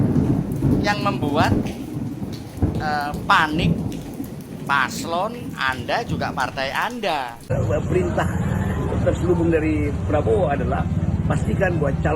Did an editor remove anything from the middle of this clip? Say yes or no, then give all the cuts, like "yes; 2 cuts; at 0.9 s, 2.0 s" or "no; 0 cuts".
yes; 1 cut; at 7.4 s